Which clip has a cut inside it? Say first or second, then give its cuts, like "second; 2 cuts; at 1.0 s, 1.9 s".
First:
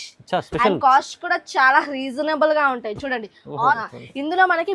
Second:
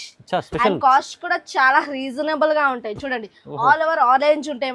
first; 1 cut; at 3.8 s